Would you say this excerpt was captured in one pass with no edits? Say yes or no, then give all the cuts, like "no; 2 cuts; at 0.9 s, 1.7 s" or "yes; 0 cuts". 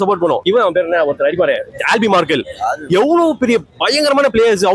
yes; 0 cuts